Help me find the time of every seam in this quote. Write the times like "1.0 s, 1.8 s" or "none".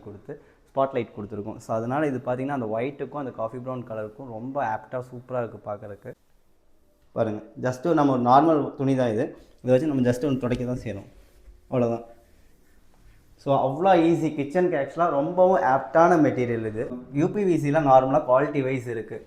6.3 s, 17.0 s